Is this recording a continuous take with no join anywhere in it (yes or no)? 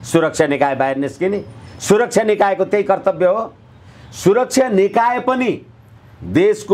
yes